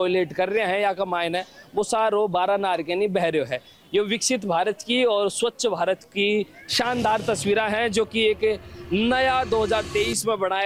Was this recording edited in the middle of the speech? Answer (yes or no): no